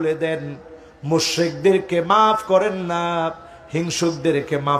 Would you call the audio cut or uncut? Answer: uncut